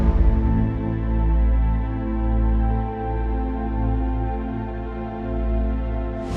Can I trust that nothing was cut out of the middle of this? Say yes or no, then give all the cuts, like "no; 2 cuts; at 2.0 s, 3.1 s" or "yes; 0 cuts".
yes; 0 cuts